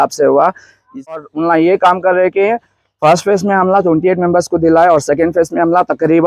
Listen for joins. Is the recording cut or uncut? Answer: cut